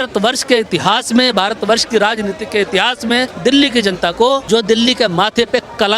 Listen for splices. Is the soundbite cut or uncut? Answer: cut